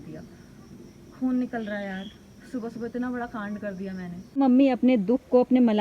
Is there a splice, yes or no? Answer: yes